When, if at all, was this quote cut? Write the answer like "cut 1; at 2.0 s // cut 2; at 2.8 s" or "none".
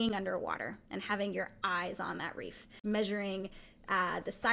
cut 1; at 2.8 s